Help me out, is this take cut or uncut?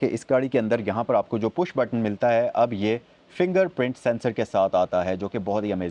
uncut